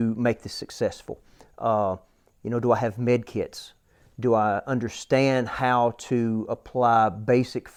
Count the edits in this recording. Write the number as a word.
zero